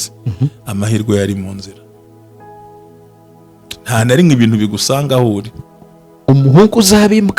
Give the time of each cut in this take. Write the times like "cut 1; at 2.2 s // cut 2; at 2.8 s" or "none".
cut 1; at 5.5 s